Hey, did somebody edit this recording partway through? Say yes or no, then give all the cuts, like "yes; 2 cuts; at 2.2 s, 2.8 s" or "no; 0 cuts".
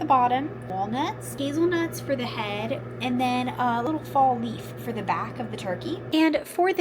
yes; 2 cuts; at 1.0 s, 3.8 s